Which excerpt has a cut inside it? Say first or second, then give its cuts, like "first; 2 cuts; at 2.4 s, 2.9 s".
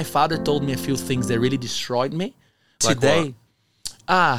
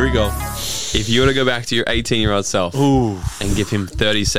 first; 1 cut; at 2.8 s